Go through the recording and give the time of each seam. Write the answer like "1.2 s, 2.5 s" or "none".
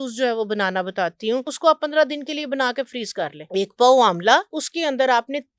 1.5 s, 3.4 s, 4.6 s